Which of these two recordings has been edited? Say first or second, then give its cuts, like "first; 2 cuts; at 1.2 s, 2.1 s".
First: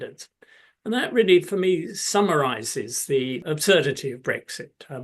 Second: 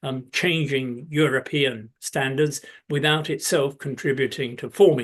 first; 1 cut; at 3.4 s